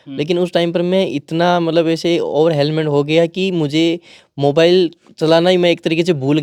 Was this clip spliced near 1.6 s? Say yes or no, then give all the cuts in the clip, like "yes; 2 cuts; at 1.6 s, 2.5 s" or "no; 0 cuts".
no; 0 cuts